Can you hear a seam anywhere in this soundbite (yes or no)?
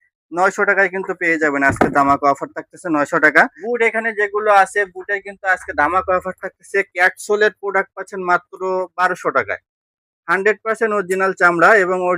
yes